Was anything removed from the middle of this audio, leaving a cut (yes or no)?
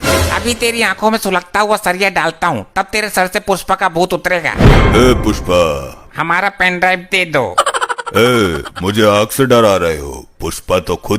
yes